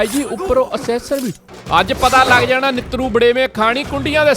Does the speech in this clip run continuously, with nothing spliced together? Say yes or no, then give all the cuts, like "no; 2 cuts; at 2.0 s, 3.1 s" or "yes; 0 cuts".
no; 1 cut; at 1.4 s